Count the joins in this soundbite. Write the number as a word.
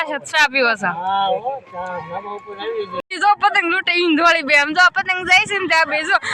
one